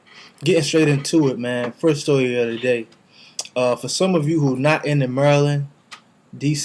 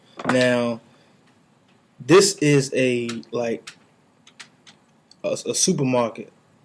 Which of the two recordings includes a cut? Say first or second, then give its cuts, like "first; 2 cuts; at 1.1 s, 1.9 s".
second; 1 cut; at 1.8 s